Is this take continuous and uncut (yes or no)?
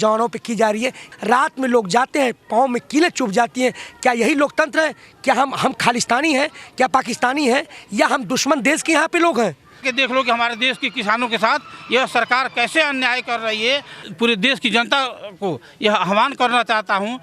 no